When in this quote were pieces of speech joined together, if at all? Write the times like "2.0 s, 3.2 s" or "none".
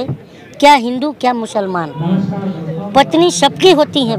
none